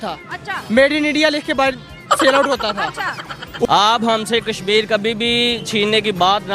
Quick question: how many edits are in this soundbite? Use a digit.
1